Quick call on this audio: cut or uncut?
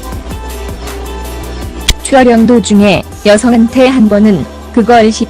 cut